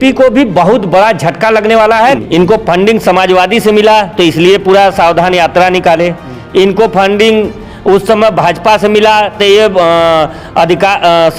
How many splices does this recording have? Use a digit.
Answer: 1